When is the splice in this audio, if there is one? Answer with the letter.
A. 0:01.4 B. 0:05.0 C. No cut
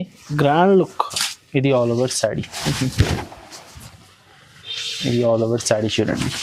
C